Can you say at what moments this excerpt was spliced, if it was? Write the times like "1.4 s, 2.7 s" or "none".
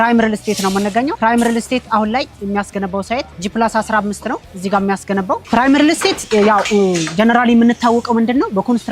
5.4 s